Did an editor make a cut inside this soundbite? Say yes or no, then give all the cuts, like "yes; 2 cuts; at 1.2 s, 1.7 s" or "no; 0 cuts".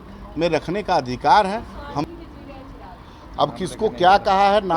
yes; 1 cut; at 2.0 s